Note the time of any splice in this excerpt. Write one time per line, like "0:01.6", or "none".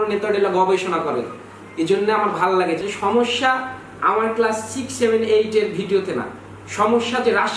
0:02.8